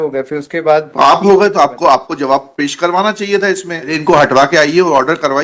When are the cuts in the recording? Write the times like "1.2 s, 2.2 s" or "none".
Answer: 4.0 s

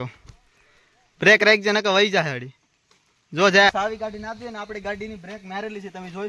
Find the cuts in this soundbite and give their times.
3.7 s

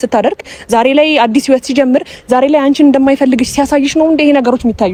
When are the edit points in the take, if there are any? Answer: none

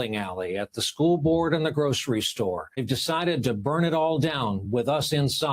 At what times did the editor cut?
2.8 s

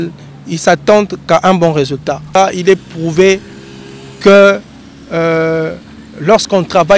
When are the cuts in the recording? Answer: 2.2 s

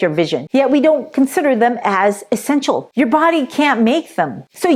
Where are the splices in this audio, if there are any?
2.8 s

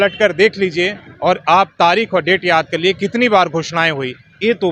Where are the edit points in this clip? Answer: none

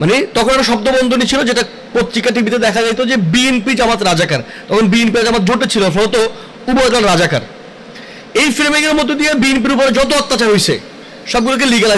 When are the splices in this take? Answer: none

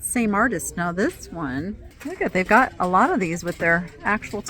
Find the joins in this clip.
1.9 s

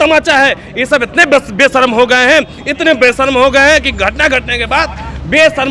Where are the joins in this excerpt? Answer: none

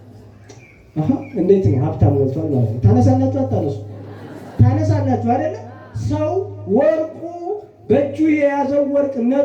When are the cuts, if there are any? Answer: none

